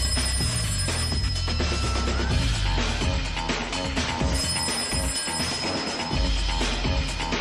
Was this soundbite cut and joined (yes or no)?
no